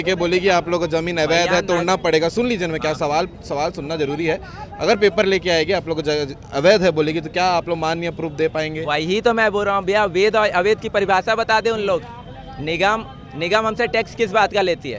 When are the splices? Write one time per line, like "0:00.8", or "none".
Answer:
none